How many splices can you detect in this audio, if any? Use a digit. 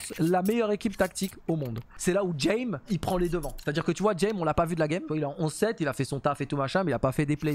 3